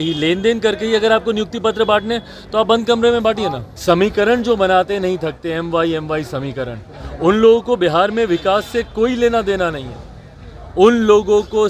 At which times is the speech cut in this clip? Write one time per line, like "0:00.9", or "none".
0:03.7